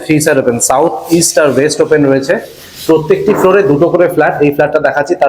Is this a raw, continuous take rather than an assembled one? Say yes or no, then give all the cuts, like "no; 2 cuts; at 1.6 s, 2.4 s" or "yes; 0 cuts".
yes; 0 cuts